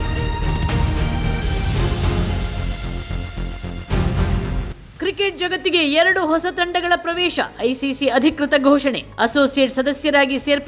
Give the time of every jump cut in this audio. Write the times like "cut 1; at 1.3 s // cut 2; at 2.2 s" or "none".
cut 1; at 4.8 s